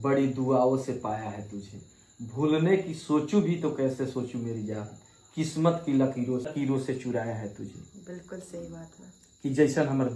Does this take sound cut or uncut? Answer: cut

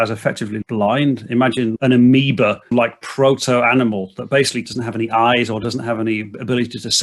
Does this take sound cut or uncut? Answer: cut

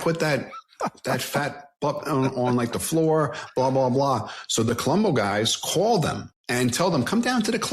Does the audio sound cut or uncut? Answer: cut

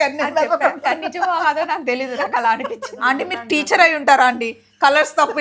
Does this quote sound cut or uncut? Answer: cut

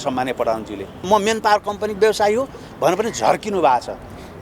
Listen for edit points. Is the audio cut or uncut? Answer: cut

